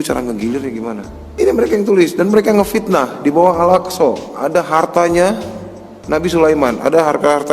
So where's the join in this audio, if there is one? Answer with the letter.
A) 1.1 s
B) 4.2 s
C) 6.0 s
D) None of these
A